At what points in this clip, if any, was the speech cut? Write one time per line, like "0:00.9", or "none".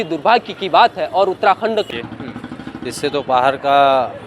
0:01.9